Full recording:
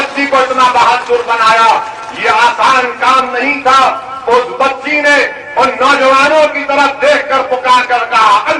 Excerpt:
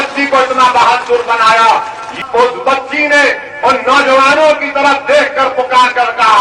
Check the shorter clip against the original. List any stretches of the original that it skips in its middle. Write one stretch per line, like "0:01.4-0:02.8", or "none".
0:02.1-0:04.1